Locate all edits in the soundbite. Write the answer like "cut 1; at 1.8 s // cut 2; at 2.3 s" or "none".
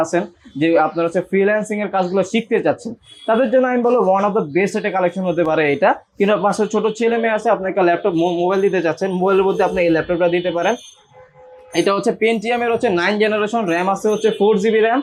none